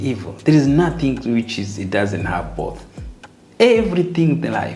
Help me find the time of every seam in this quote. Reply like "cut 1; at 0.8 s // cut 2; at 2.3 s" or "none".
none